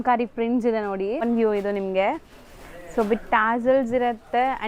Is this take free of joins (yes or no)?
no